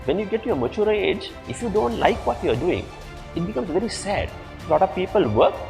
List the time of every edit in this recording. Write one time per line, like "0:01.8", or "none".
0:04.6